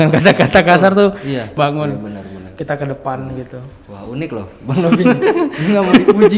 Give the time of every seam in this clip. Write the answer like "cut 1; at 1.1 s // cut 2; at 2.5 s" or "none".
cut 1; at 1.5 s